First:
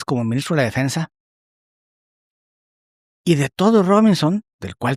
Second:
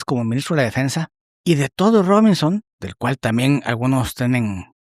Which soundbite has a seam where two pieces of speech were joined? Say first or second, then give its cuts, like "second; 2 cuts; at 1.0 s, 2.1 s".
second; 1 cut; at 1.2 s